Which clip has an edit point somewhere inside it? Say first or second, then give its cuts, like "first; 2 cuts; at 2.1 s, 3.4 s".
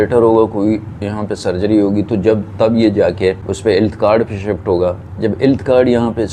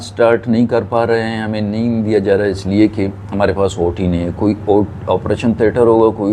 first; 1 cut; at 3.5 s